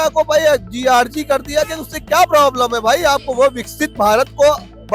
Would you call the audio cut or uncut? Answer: uncut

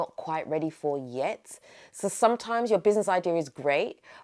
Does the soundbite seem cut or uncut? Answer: uncut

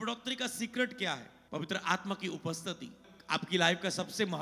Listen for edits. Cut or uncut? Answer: cut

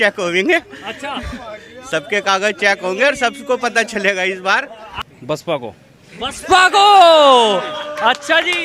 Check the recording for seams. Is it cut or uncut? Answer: cut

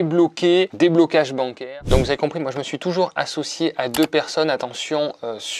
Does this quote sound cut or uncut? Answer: cut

